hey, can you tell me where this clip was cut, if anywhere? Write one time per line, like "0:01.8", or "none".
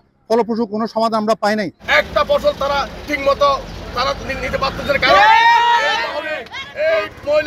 0:01.8